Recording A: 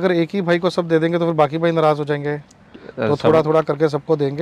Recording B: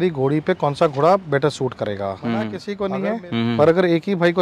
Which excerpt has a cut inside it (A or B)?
B